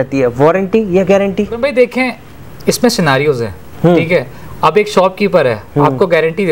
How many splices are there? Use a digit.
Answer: 0